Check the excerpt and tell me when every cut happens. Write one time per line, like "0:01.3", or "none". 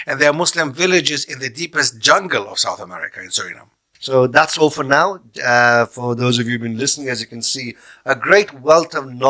0:04.1